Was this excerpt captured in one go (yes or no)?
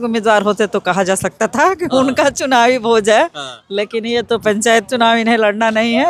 yes